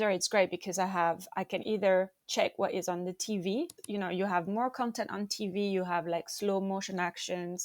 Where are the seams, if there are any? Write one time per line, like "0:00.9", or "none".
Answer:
0:03.8